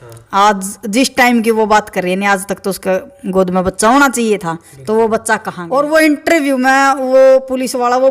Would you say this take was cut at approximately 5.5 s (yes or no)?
yes